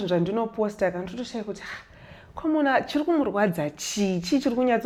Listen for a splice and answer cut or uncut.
uncut